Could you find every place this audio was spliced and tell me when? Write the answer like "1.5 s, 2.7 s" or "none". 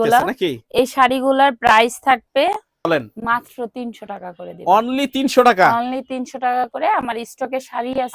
2.9 s